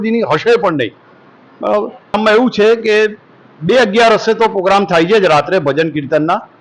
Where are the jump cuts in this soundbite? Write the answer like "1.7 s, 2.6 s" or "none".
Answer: 2.1 s